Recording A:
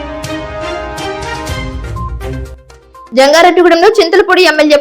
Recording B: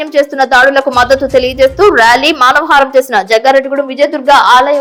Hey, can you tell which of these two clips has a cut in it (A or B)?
A